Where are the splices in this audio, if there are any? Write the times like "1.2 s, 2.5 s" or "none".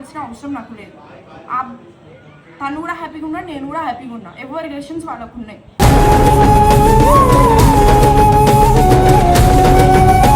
5.2 s

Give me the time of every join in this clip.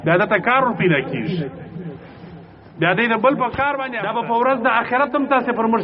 3.9 s

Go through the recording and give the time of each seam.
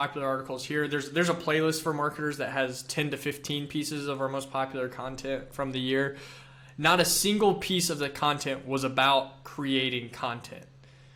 none

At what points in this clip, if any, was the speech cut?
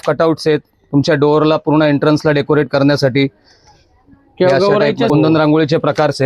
5.1 s

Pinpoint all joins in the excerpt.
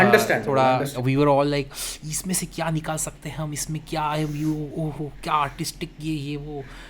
0.9 s

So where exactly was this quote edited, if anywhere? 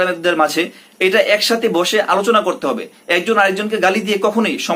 none

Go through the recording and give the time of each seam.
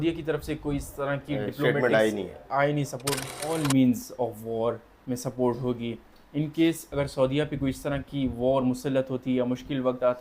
3.2 s

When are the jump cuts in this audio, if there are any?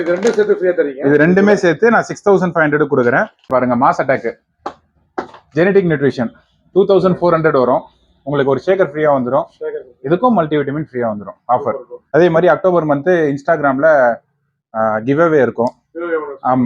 3.5 s, 11.9 s

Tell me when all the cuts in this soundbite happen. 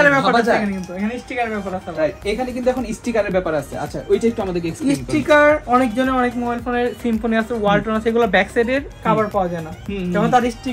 none

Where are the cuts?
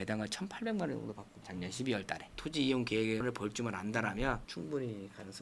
2.3 s, 4.5 s

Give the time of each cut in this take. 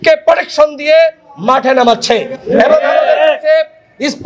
none

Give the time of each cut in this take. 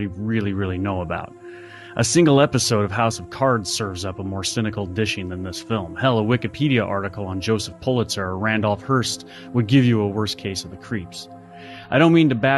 6.6 s

